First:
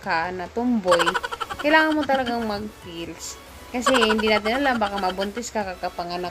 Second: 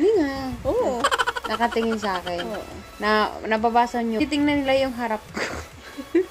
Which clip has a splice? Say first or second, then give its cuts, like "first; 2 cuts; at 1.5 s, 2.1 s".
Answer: second; 1 cut; at 4.2 s